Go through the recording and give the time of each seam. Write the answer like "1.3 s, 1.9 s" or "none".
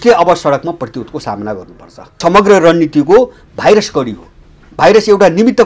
2.2 s